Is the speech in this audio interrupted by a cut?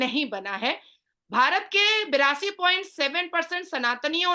no; 0 cuts

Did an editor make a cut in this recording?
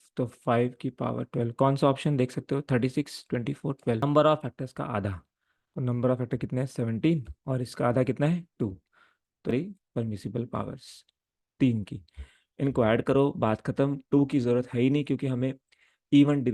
yes; 2 cuts; at 4.0 s, 9.5 s

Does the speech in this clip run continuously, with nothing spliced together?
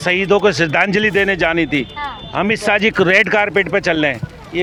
yes; 0 cuts

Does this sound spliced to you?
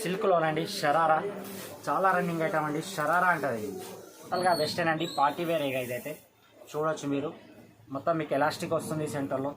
yes; 1 cut; at 4.3 s

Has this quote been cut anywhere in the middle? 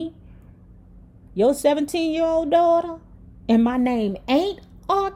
no; 0 cuts

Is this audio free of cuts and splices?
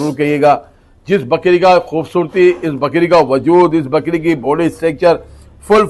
yes; 0 cuts

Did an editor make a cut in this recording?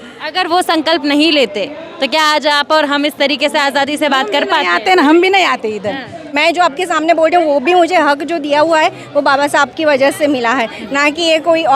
yes; 1 cut; at 6.3 s

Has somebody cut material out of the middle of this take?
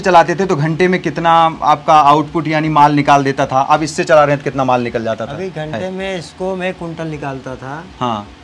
no; 0 cuts

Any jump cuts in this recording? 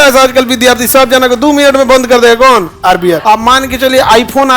yes; 1 cut; at 3.2 s

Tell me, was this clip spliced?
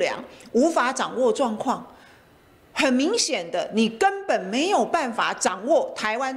no; 0 cuts

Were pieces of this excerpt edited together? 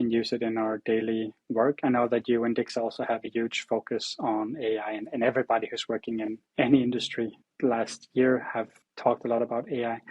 yes; 3 cuts; at 6.4 s, 7.4 s, 8.8 s

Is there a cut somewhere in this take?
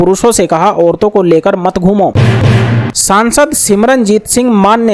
yes; 1 cut; at 2.2 s

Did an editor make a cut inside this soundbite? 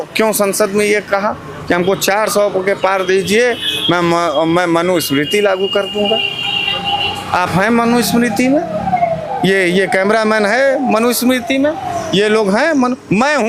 no; 0 cuts

